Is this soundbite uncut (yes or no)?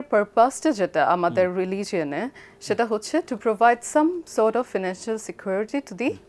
yes